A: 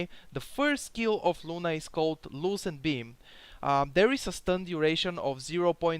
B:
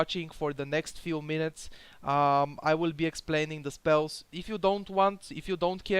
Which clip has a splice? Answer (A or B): B